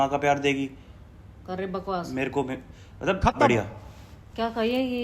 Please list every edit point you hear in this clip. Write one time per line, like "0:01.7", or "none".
none